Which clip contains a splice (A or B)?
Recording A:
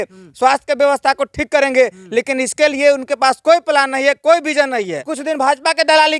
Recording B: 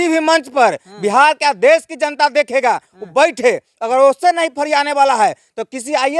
A